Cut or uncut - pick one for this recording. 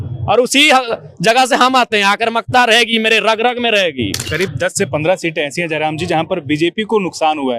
cut